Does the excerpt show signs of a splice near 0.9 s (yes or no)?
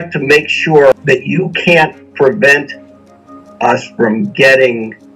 yes